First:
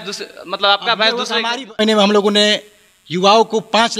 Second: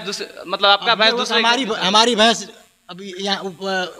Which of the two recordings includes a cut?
first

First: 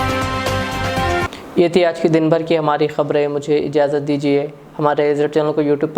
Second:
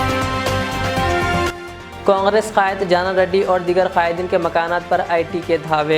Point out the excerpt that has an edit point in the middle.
second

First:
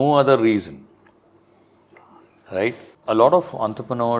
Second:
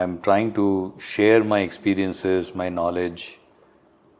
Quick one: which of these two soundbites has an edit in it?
first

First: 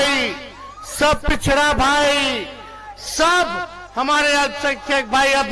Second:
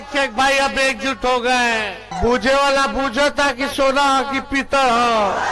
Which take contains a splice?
second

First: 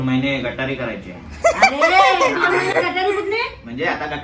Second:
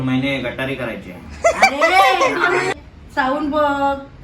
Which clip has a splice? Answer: second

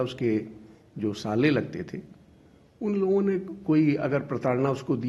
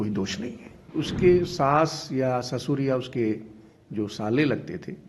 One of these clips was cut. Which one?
second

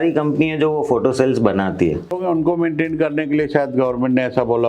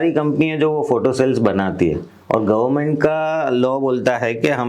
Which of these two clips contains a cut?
first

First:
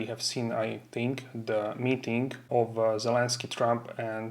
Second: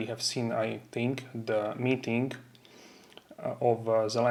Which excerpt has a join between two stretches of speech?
first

